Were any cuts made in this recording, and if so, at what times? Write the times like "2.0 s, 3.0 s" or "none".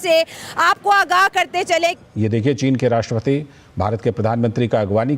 2.0 s